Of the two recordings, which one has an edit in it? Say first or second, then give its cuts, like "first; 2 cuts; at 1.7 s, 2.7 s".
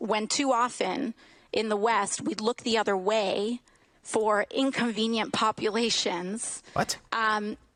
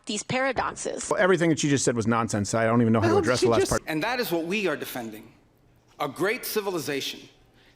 second; 2 cuts; at 1.1 s, 3.7 s